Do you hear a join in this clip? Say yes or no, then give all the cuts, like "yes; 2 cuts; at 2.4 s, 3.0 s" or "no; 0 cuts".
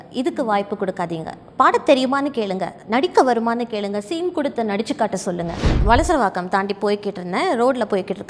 yes; 1 cut; at 5.7 s